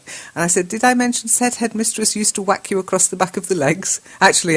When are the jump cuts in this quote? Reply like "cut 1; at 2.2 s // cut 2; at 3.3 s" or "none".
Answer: none